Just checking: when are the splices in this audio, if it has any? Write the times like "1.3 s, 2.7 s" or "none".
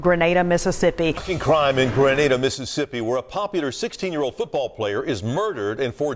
1.2 s